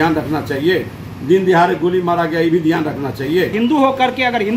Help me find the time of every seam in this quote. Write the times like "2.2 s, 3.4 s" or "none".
3.5 s

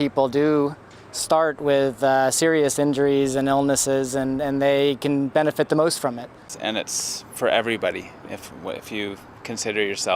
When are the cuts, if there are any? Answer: 1.4 s

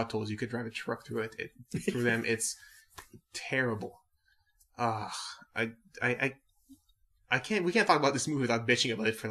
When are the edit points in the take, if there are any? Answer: 3.6 s

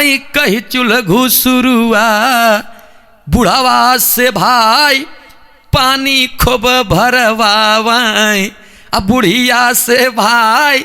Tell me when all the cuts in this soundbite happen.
none

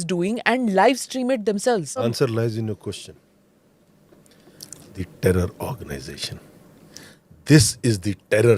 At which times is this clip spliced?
2.1 s

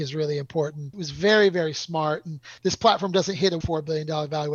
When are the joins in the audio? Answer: 1.0 s, 3.6 s

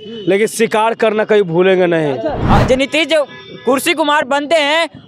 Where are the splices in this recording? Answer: 2.4 s

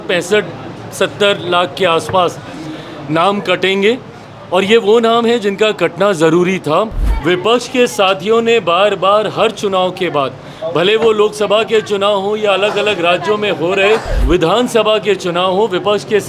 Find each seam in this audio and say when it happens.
7.0 s, 14.1 s

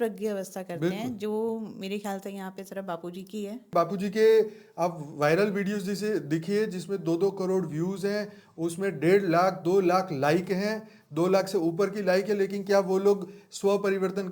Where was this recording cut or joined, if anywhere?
3.7 s

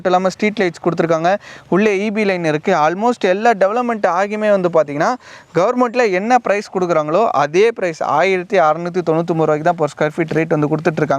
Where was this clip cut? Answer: none

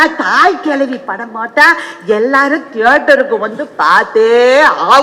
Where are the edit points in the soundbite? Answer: none

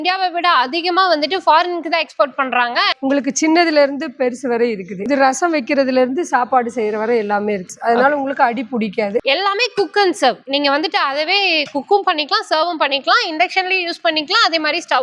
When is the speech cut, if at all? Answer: 2.9 s, 5.1 s, 7.7 s, 9.2 s

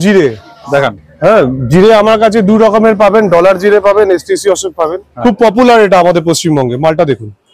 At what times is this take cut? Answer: 5.0 s

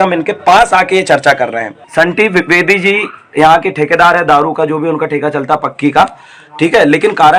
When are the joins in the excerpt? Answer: 1.7 s

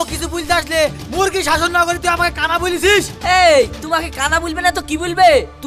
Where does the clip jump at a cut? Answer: none

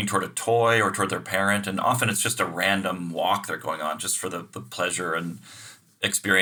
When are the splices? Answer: none

